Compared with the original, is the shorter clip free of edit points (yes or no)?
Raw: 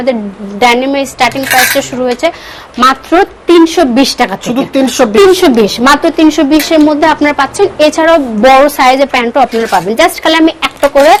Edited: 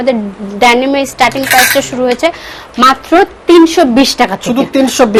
yes